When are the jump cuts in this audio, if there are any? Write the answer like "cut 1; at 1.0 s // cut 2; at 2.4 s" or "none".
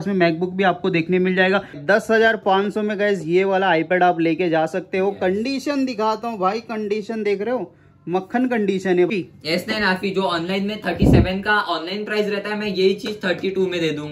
cut 1; at 1.8 s // cut 2; at 9.1 s